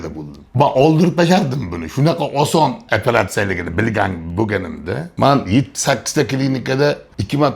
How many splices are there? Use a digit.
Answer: 1